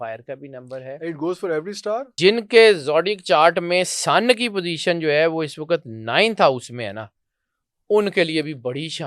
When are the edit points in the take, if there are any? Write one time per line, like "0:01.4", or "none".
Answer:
0:02.1